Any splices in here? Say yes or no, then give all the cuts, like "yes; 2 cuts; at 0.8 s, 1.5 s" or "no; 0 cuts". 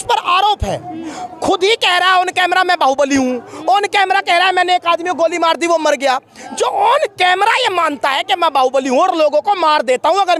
no; 0 cuts